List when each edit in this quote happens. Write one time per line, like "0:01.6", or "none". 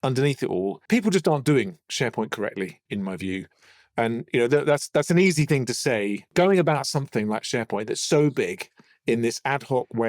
0:00.8
0:02.8
0:06.3